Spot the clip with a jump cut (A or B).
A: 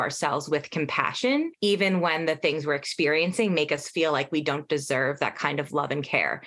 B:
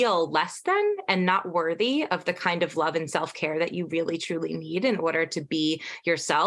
A